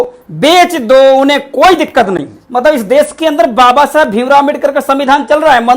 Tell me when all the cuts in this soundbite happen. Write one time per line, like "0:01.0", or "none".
0:02.4

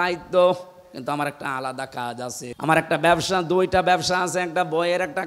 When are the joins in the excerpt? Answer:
0:02.5

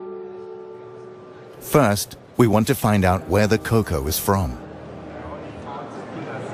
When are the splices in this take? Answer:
none

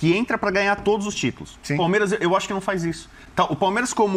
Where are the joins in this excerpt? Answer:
none

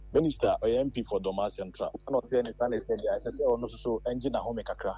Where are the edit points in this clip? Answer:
none

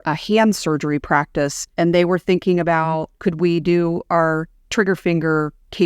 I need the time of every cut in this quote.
0:01.6
0:03.1

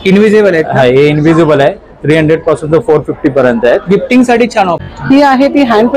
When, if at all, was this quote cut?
0:04.9

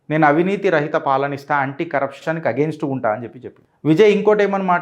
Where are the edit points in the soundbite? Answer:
0:02.2

